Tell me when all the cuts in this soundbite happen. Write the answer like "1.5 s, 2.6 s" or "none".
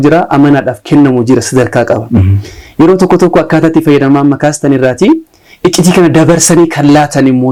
none